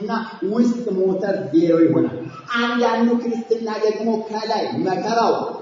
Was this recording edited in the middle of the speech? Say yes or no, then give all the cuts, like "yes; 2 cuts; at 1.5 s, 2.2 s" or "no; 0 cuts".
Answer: no; 0 cuts